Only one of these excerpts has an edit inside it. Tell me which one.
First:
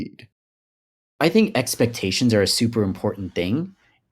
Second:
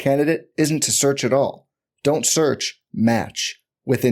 first; 1 cut; at 1.0 s

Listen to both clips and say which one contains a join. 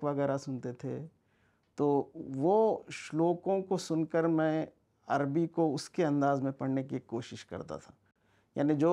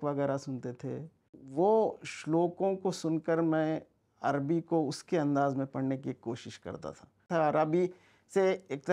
second; 2 cuts; at 1.4 s, 7.2 s

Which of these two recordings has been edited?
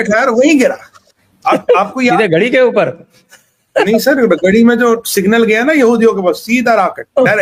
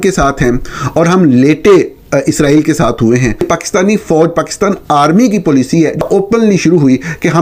second; 2 cuts; at 3.5 s, 6.0 s

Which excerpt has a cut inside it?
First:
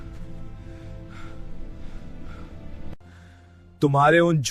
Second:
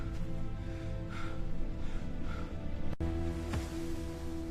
second; 1 cut; at 3.0 s

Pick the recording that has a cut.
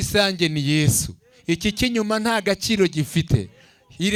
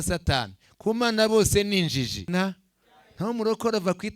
second; 1 cut; at 2.2 s

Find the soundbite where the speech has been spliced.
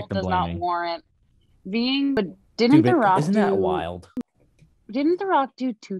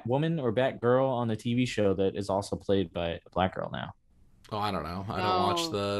first; 1 cut; at 2.2 s

